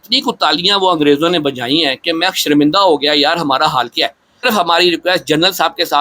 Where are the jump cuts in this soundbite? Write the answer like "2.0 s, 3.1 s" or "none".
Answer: 4.4 s